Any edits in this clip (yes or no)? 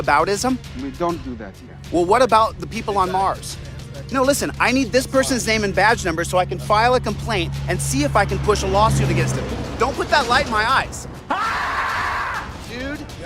no